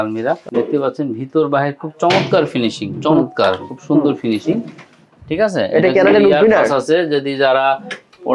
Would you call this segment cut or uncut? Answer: uncut